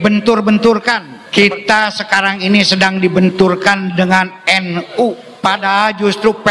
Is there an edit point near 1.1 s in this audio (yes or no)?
yes